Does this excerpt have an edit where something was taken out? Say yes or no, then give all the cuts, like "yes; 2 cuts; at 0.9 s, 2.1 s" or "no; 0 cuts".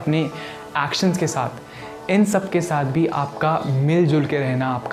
no; 0 cuts